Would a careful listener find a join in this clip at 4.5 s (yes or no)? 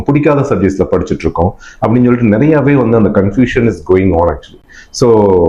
no